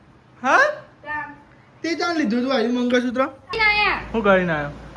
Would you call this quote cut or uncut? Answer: cut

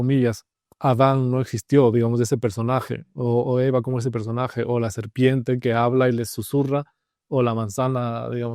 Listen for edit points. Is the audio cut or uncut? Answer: uncut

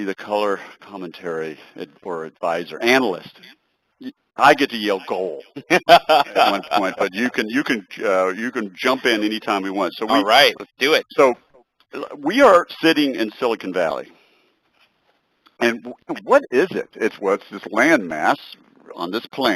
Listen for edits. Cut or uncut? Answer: cut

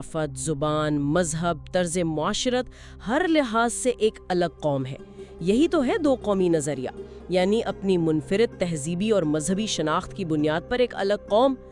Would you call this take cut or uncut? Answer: uncut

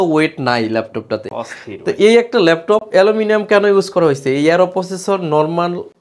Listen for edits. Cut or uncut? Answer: uncut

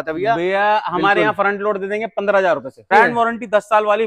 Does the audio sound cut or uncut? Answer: cut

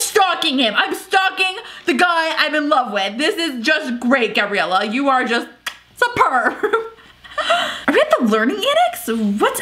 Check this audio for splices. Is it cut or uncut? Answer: uncut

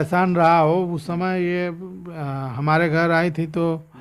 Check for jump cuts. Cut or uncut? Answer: uncut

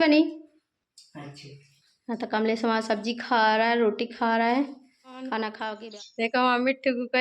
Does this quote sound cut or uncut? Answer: cut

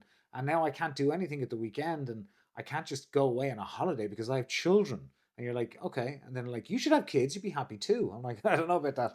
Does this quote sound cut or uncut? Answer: uncut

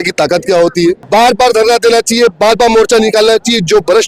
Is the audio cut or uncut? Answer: cut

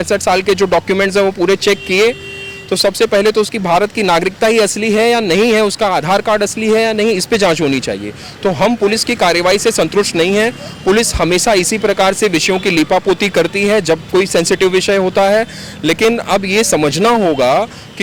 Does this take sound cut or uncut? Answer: uncut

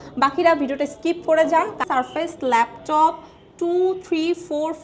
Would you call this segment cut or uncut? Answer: cut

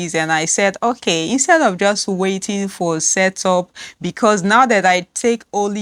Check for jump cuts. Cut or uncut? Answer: uncut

